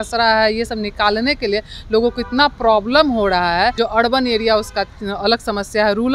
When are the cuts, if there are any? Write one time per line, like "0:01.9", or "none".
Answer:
0:03.7